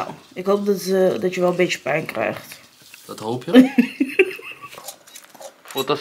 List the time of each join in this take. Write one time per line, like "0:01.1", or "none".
0:04.8

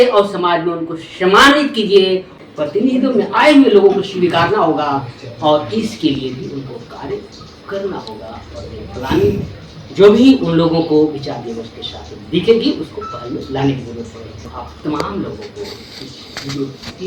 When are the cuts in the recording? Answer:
0:02.3
0:14.4

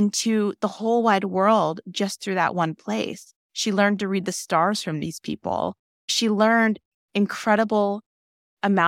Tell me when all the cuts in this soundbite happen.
none

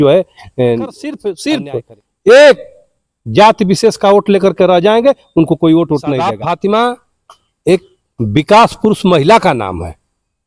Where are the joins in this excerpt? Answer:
0:01.3
0:06.3

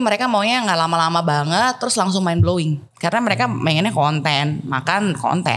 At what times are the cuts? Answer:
0:02.9

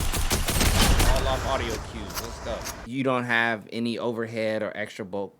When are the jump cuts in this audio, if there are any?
0:02.7

